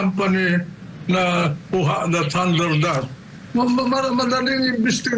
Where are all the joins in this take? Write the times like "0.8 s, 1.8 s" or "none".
none